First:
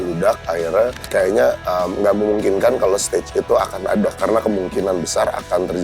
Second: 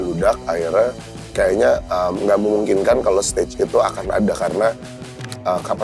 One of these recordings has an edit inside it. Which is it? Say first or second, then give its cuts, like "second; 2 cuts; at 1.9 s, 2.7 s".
first; 2 cuts; at 1.0 s, 4.1 s